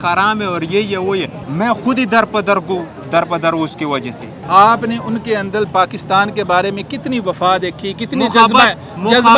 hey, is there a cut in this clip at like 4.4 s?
yes; 2 cuts; at 1.4 s, 4.4 s

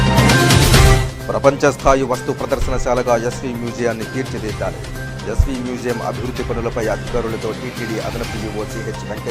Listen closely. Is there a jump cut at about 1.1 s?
no; 0 cuts

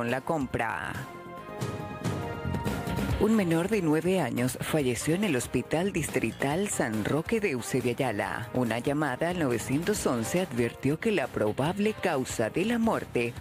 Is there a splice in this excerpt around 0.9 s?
no; 0 cuts

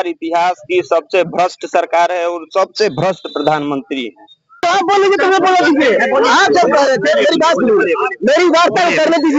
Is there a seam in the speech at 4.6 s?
yes; 1 cut; at 4.6 s

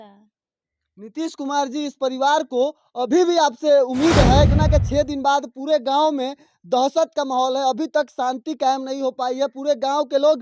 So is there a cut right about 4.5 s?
yes; 1 cut; at 4.5 s

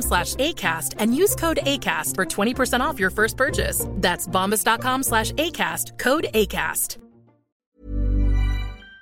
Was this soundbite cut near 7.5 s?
yes; 1 cut; at 7.5 s

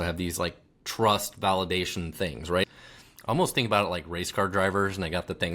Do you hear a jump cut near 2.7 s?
yes; 1 cut; at 2.7 s

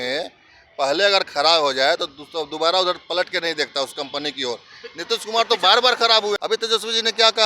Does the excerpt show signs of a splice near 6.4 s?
yes; 1 cut; at 6.4 s

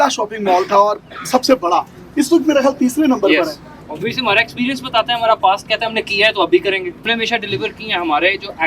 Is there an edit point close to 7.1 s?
yes; 2 cuts; at 3.8 s, 7.1 s

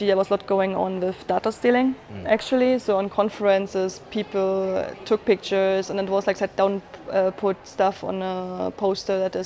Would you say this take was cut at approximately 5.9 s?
yes; 1 cut; at 5.9 s

